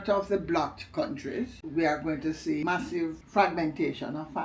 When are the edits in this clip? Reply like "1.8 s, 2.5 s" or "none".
1.6 s, 2.6 s